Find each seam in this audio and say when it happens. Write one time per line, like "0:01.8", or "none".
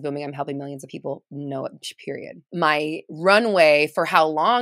0:02.5